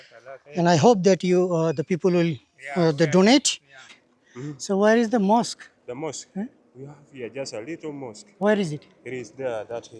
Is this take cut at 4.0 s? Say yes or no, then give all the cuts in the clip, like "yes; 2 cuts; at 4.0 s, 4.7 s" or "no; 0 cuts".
yes; 1 cut; at 4.0 s